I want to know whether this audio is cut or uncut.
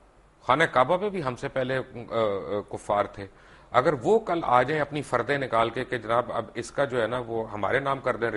uncut